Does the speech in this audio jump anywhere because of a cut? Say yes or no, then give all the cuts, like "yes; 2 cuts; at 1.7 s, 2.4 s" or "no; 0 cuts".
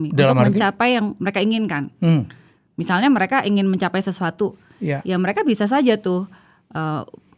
no; 0 cuts